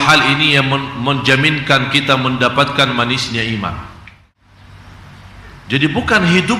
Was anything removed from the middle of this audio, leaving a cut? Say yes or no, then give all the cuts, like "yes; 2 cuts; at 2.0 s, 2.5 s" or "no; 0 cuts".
yes; 1 cut; at 4.3 s